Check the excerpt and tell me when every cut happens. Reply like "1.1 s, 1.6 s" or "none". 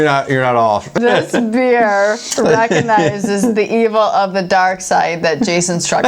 0.9 s

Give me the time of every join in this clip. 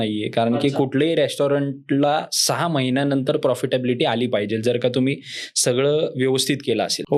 none

